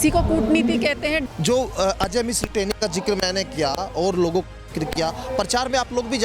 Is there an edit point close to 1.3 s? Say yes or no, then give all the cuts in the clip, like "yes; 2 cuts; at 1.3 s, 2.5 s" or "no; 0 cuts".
yes; 1 cut; at 1.3 s